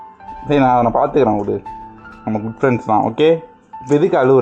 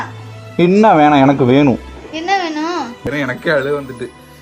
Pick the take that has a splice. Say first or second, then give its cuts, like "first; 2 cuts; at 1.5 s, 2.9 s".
second; 1 cut; at 3.1 s